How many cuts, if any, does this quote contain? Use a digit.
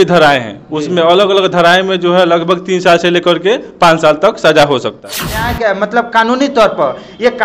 1